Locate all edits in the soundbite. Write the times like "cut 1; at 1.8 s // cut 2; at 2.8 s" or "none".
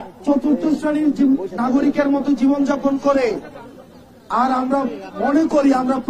none